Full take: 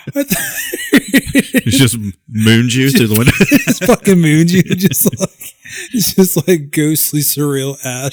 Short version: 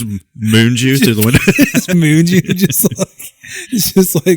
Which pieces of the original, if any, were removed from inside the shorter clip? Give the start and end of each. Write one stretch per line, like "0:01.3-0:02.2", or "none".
0:03.9-0:04.1